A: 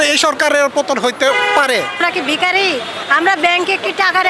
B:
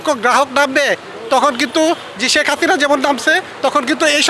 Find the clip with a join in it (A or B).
A